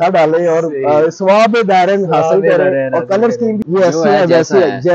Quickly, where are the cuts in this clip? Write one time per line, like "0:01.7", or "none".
0:03.6